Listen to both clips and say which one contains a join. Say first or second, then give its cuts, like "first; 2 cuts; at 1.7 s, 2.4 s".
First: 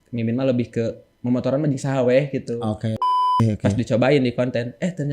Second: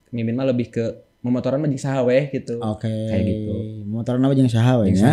first; 1 cut; at 3.2 s